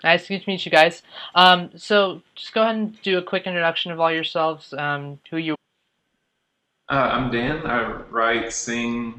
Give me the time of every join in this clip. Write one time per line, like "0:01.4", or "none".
none

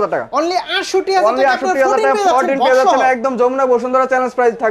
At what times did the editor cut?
none

